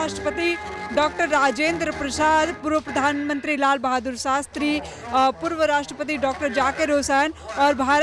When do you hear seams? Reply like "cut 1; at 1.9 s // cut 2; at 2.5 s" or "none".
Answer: none